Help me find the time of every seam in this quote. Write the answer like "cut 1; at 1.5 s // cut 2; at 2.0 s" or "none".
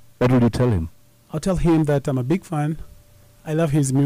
none